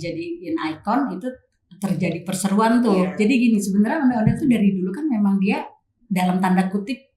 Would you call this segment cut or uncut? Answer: cut